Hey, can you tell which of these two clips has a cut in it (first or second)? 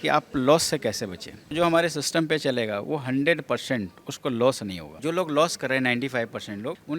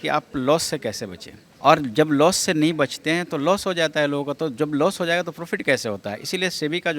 first